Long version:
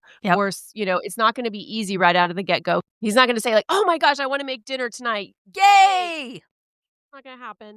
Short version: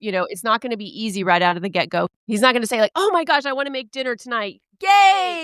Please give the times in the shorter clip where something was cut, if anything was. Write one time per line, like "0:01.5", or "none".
none